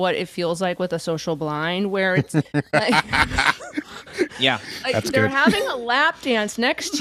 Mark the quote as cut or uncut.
uncut